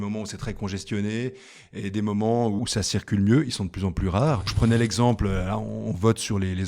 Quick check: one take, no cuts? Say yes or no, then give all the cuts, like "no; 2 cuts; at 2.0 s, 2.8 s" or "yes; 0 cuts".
no; 2 cuts; at 2.6 s, 4.5 s